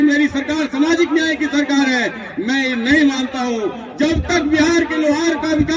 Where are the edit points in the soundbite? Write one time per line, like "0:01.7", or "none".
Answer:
none